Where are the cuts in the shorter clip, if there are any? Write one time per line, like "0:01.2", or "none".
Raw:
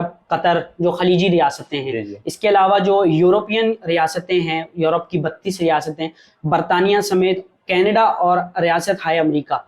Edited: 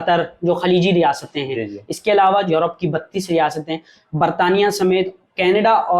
0:02.5